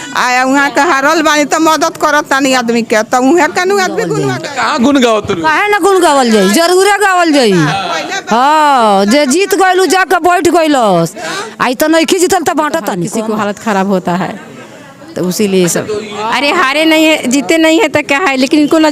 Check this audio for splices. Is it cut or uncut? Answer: cut